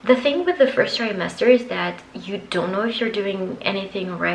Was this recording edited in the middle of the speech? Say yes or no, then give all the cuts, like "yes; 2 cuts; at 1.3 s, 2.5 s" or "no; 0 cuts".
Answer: no; 0 cuts